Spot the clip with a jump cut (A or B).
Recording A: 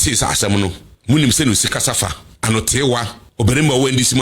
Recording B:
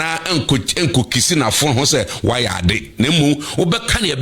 A